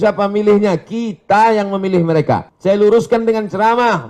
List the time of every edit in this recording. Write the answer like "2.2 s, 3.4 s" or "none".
2.5 s